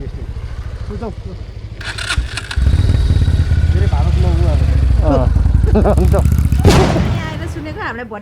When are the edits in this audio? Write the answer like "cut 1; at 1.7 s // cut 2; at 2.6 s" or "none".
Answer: cut 1; at 7.2 s

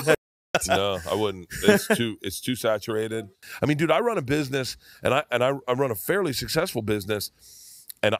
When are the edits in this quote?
cut 1; at 3.4 s

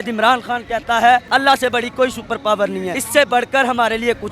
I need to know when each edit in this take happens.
none

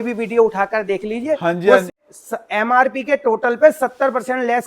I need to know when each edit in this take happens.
cut 1; at 1.9 s

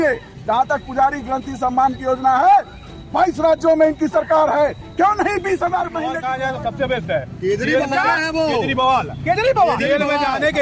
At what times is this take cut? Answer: cut 1; at 6.1 s

